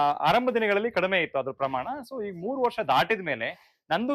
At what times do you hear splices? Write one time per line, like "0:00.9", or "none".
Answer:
none